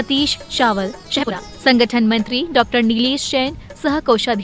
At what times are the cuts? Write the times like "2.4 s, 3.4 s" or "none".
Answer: 1.4 s